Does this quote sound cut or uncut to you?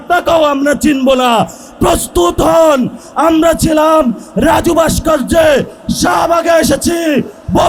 uncut